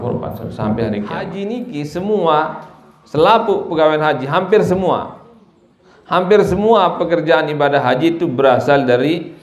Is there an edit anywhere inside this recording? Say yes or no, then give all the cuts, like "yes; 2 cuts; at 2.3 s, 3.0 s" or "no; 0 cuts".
yes; 1 cut; at 1.4 s